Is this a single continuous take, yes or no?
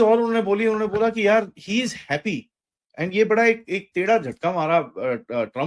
yes